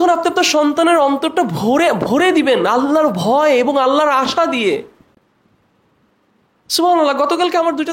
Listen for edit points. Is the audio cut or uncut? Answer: uncut